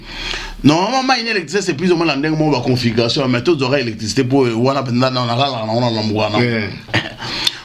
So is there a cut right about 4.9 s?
no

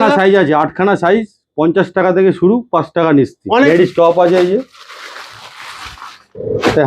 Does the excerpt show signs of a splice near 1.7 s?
no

